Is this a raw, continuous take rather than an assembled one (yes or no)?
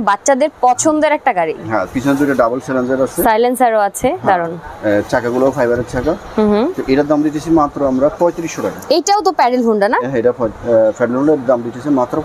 yes